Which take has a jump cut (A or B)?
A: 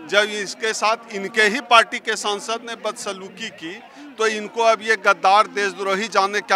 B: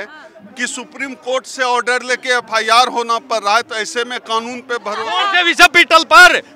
B